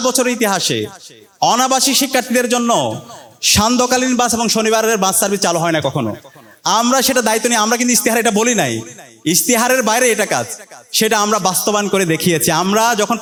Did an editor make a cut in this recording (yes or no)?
no